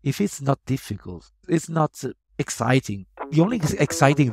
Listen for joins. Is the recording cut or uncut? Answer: cut